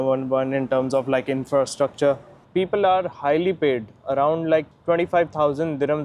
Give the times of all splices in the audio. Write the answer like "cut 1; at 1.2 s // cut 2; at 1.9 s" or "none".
cut 1; at 2.3 s

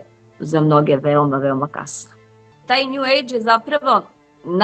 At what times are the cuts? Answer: cut 1; at 2.6 s

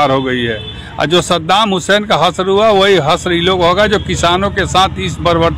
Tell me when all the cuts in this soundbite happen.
none

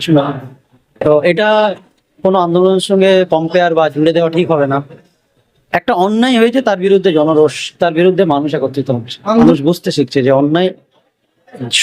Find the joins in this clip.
cut 1; at 9.5 s

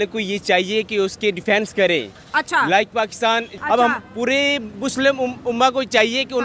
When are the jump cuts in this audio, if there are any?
none

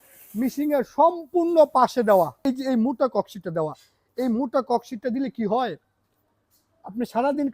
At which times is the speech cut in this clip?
cut 1; at 2.4 s

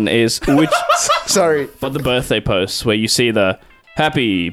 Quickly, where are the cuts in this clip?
cut 1; at 1.8 s

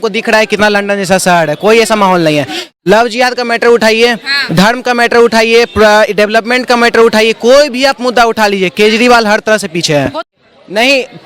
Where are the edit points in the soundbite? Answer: cut 1; at 2.6 s // cut 2; at 10.2 s

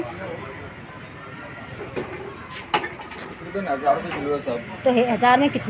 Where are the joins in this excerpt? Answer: none

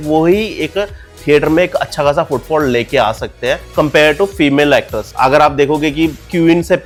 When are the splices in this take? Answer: none

